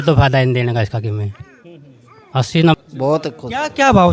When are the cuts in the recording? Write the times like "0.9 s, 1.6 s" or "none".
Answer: 2.8 s